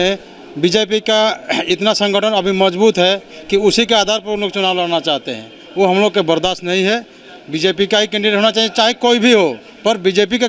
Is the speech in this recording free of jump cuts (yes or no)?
yes